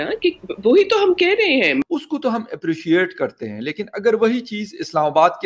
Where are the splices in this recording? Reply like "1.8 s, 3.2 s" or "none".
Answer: 1.8 s